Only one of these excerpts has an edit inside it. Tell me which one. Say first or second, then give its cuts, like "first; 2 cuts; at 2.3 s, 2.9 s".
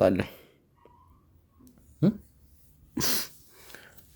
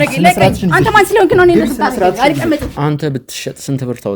second; 1 cut; at 2.7 s